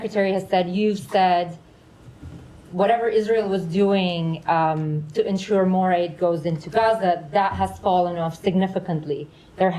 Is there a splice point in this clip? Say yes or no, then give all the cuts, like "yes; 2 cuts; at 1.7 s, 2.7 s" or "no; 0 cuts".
no; 0 cuts